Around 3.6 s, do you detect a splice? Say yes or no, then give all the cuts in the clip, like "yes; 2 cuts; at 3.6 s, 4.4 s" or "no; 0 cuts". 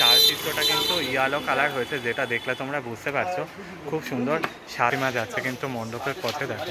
no; 1 cut; at 4.9 s